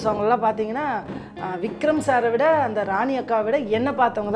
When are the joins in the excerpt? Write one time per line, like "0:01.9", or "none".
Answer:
none